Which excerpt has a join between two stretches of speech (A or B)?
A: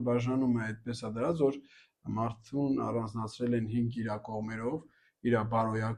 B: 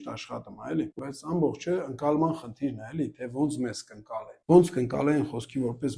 B